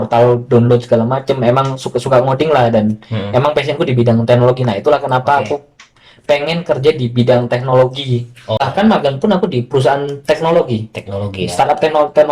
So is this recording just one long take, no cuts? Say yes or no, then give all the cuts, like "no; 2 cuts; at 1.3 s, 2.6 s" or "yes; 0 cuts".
no; 1 cut; at 8.6 s